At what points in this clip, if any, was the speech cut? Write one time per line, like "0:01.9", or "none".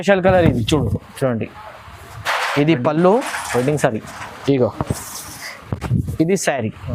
none